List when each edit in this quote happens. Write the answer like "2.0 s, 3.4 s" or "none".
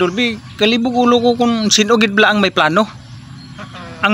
none